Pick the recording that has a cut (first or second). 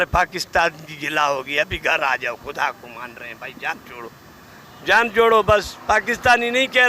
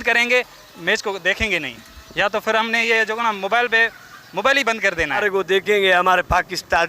second